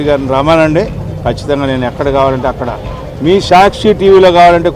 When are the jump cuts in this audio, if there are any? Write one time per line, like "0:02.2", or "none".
none